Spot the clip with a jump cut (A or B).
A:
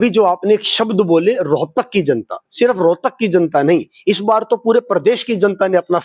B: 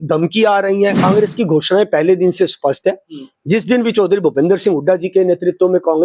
B